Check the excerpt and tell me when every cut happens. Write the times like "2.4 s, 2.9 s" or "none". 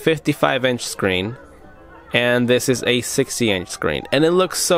none